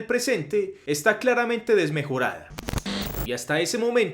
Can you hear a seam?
yes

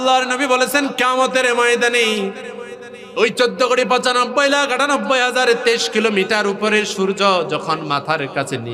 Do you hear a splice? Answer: no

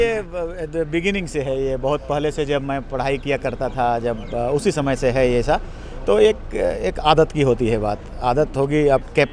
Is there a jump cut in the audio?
no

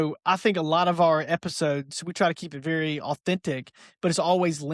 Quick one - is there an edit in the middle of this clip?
no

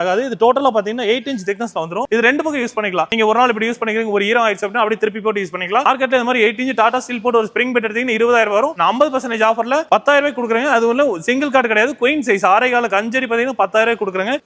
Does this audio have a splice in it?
no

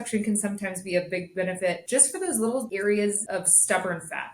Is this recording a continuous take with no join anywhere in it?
no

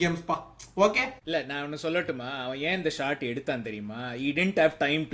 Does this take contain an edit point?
yes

